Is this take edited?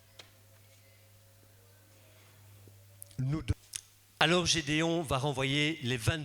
yes; 1 cut; at 3.6 s

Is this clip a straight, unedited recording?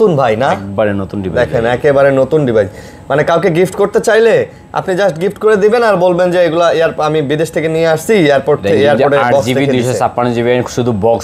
yes; 0 cuts

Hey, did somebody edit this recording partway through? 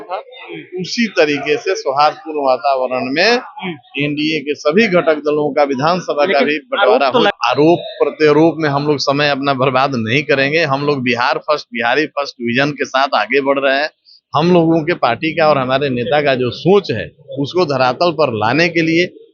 yes; 1 cut; at 7.3 s

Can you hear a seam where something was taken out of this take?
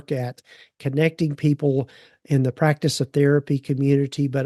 no; 0 cuts

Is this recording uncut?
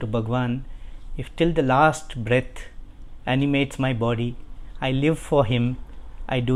yes; 0 cuts

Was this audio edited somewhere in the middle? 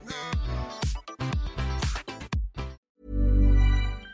yes; 1 cut; at 2.7 s

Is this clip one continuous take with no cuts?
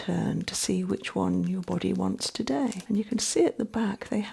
no; 1 cut; at 2.8 s

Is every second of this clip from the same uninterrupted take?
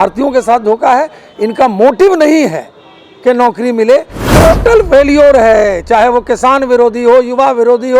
no; 1 cut; at 4.2 s

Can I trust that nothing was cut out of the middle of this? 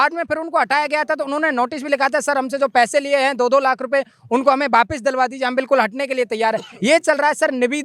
yes; 0 cuts

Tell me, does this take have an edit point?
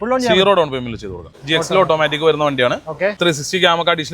yes; 2 cuts; at 1.3 s, 3.2 s

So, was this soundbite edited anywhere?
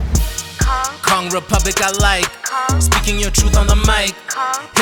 no; 0 cuts

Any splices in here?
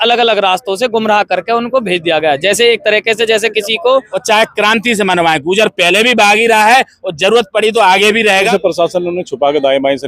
yes; 2 cuts; at 4.1 s, 8.5 s

